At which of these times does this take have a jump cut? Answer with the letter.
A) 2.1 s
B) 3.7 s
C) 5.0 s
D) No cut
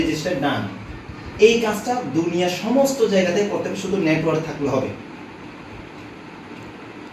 D